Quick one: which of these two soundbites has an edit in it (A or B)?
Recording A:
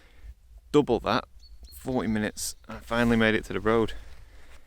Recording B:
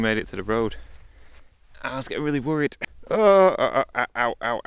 B